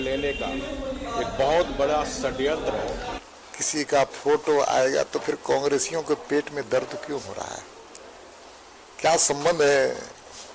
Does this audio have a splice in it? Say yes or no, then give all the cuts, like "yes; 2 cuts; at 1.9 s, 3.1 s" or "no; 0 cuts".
yes; 1 cut; at 3.2 s